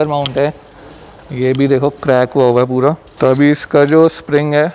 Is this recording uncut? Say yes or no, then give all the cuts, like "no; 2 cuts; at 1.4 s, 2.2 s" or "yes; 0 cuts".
no; 1 cut; at 3.1 s